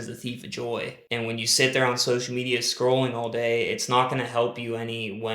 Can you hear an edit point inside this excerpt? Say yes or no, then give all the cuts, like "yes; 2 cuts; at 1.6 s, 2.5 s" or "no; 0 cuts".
yes; 1 cut; at 1.0 s